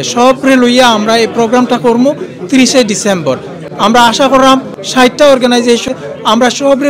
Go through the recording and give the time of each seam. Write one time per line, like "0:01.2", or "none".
0:04.8
0:05.9

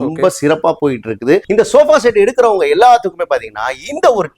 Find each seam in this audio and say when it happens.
0:01.4

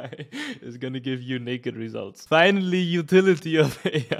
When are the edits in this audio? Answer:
0:02.1

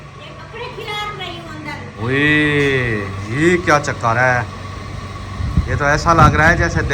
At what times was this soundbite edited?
0:01.9

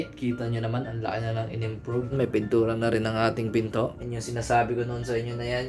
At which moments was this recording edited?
0:03.9

